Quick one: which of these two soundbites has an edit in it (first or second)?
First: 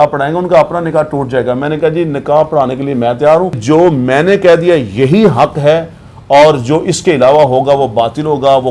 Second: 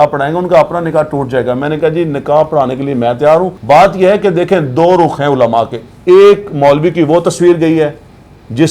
first